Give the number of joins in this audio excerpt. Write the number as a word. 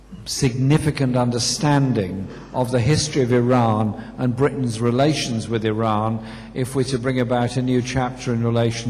zero